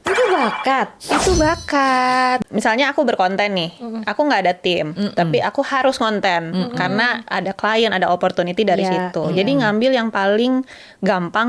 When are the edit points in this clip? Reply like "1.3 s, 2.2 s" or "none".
2.4 s